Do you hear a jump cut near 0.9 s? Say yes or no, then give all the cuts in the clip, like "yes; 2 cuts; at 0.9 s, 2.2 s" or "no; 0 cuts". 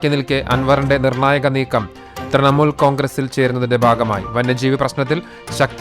yes; 1 cut; at 0.9 s